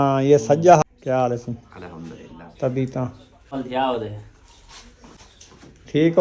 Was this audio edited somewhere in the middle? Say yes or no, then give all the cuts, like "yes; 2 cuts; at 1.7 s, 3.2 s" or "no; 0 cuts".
yes; 3 cuts; at 0.8 s, 3.5 s, 5.2 s